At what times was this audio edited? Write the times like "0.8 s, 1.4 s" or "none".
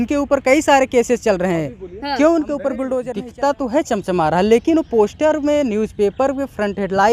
3.2 s